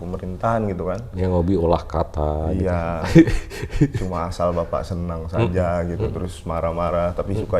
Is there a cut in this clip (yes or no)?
no